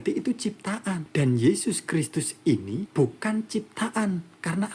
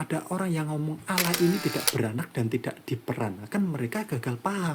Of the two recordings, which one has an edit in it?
first; 2 cuts; at 1.0 s, 2.9 s

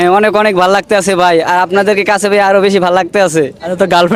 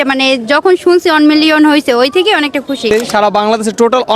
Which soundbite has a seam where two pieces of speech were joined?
second; 1 cut; at 2.9 s

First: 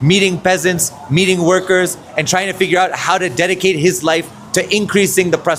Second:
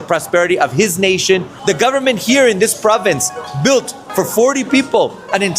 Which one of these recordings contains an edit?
second; 1 cut; at 1.5 s

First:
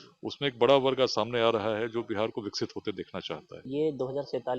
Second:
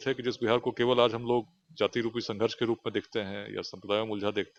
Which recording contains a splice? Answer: first; 1 cut; at 3.7 s

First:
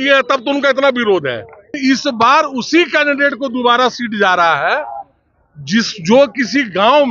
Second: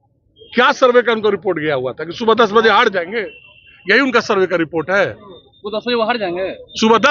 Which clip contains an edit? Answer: first; 1 cut; at 1.8 s

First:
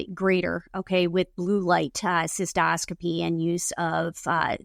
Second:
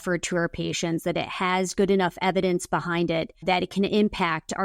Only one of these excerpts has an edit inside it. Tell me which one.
second; 1 cut; at 3.3 s

